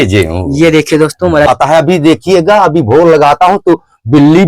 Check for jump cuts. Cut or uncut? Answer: cut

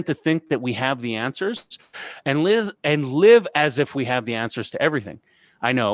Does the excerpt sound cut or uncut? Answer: uncut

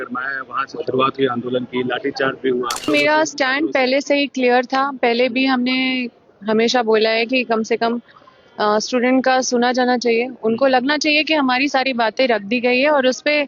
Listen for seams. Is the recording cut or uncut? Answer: cut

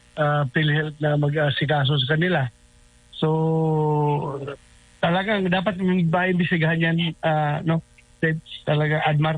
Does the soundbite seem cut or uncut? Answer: uncut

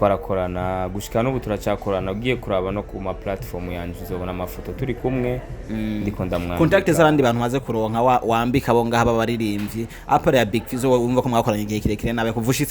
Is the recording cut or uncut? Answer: uncut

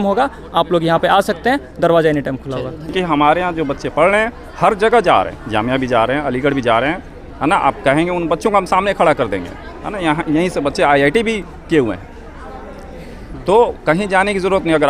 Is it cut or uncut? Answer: cut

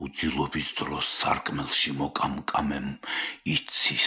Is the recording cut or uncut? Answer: uncut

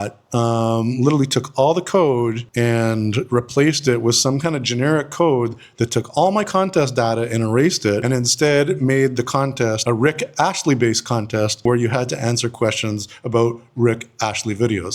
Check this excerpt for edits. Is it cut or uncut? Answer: uncut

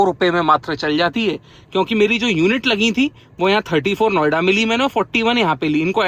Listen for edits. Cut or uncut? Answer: uncut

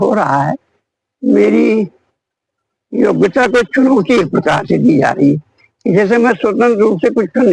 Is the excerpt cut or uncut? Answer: uncut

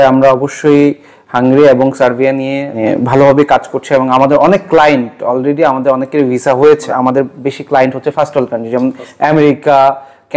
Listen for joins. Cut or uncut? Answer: cut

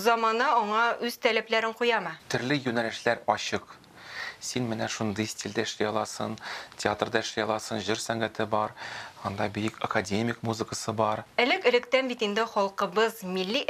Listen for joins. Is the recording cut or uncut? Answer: cut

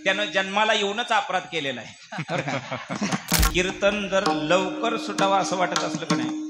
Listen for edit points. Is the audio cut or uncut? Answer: cut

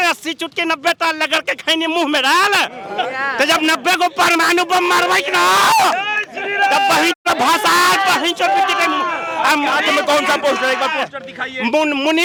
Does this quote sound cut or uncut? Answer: uncut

